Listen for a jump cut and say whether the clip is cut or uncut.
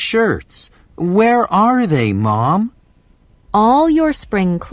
cut